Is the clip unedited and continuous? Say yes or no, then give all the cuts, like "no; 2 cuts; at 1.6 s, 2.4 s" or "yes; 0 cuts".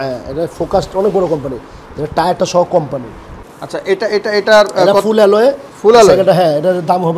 yes; 0 cuts